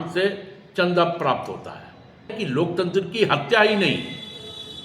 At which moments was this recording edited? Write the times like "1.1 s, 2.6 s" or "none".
2.3 s